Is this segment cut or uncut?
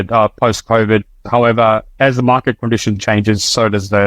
cut